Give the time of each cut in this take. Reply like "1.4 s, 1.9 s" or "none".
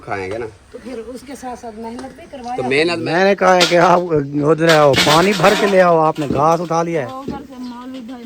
3.0 s